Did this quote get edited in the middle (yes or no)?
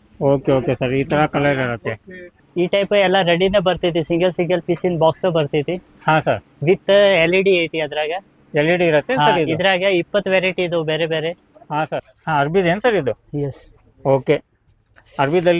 yes